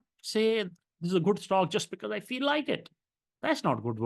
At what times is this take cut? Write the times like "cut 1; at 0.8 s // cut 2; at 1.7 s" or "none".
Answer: none